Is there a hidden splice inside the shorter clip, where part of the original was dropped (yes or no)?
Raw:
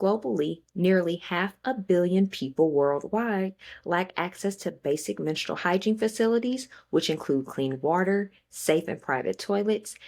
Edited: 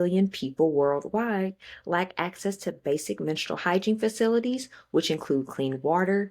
no